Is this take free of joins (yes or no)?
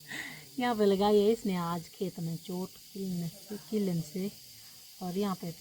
yes